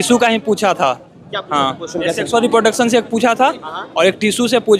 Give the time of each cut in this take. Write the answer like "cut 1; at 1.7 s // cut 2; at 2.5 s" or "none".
none